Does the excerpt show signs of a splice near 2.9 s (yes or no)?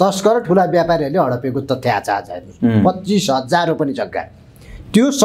no